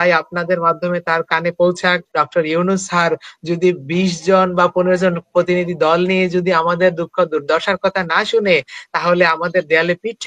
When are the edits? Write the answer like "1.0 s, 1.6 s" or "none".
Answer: 2.1 s